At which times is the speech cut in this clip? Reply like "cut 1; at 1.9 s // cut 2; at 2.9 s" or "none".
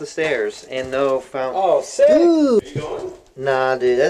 cut 1; at 2.6 s

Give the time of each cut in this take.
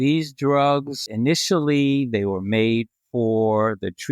cut 1; at 1.0 s

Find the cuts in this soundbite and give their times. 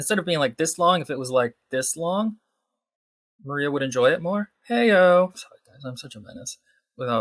cut 1; at 5.5 s

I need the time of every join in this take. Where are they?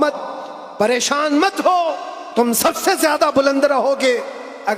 none

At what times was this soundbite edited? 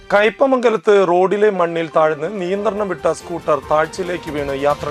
none

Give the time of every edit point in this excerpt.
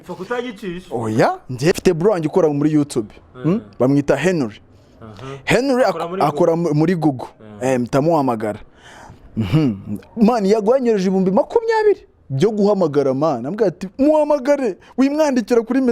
cut 1; at 1.7 s

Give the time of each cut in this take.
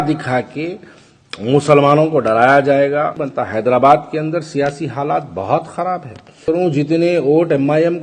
cut 1; at 3.2 s // cut 2; at 6.4 s

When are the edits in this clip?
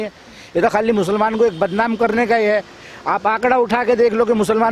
none

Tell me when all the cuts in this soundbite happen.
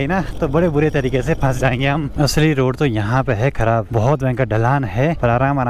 none

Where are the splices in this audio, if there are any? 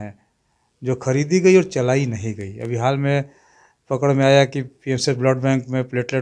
none

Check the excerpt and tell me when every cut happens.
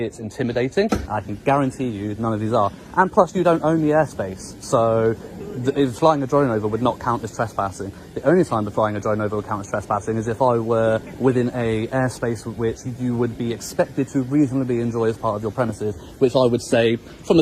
cut 1; at 1.0 s

